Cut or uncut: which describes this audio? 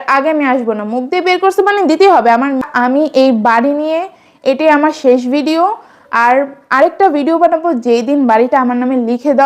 cut